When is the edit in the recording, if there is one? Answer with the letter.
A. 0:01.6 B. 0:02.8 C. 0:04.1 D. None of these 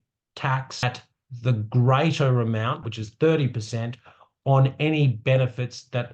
B